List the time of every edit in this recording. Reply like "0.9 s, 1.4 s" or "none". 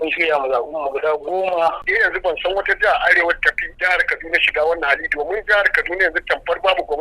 1.8 s